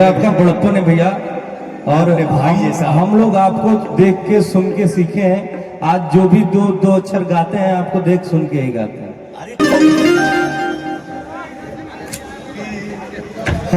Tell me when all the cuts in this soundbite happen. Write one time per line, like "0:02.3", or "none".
0:09.6